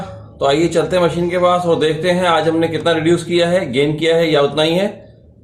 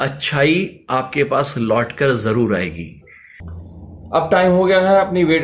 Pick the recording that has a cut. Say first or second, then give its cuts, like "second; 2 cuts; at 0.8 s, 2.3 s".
second; 1 cut; at 3.6 s